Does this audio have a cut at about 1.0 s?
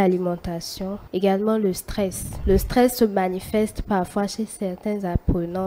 yes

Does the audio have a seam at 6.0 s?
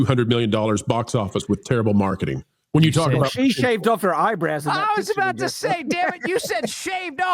no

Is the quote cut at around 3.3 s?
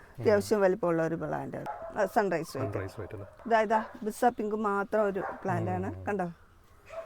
yes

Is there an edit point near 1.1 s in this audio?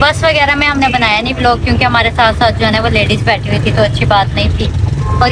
no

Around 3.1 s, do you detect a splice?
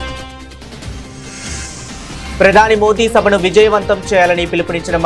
no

